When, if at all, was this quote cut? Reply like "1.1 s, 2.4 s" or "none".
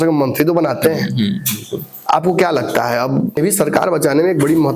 3.4 s